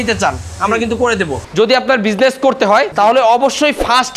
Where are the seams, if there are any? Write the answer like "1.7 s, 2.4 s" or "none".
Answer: 1.4 s, 2.9 s